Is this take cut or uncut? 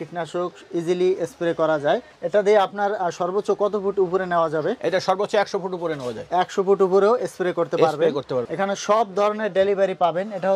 cut